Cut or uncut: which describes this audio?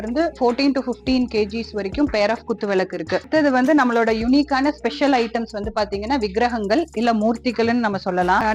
cut